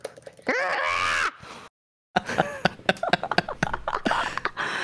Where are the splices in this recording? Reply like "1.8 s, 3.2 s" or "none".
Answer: none